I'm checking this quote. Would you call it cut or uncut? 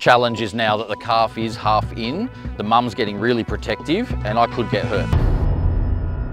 cut